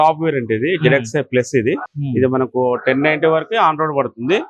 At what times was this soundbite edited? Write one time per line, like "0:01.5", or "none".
0:01.8